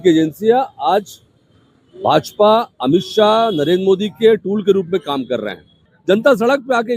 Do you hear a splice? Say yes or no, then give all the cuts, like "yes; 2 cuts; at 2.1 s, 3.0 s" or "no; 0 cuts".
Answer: yes; 1 cut; at 5.9 s